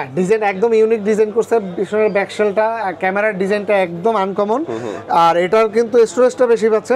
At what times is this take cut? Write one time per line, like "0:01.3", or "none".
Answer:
none